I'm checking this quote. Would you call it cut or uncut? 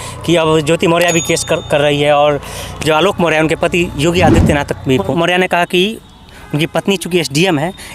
cut